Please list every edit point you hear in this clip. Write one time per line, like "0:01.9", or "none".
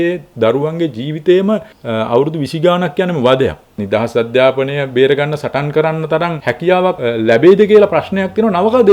0:01.8
0:03.8
0:06.7